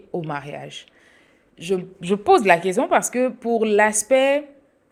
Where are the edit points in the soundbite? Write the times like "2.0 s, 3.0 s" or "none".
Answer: none

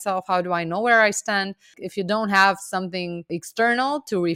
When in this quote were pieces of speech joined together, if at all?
1.8 s, 3.2 s

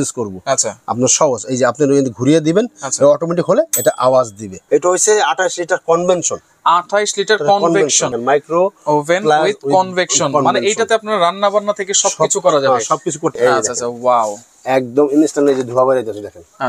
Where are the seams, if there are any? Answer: 4.5 s, 8.1 s, 13.3 s

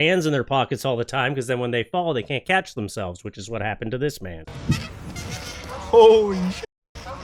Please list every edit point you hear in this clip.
4.4 s

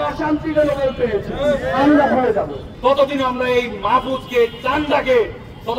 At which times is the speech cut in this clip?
2.6 s

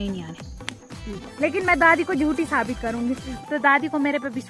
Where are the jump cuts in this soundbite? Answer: 1.2 s, 3.3 s

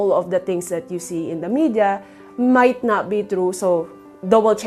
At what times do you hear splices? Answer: none

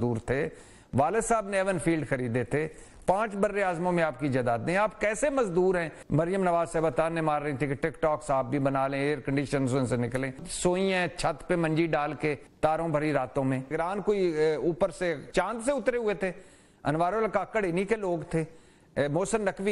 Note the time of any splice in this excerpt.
6.0 s, 10.4 s, 12.5 s, 13.7 s, 15.2 s

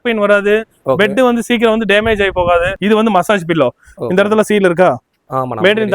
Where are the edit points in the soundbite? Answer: 2.7 s

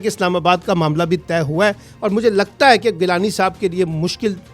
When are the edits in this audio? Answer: none

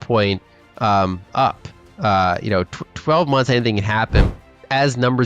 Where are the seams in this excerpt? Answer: 4.3 s

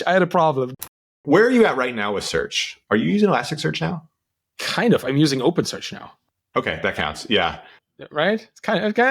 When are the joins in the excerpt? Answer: 1.0 s

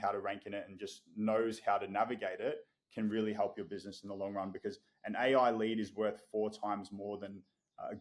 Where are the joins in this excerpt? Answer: none

